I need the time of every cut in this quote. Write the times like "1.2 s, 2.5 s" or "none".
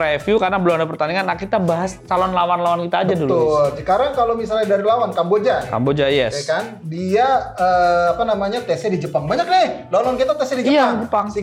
none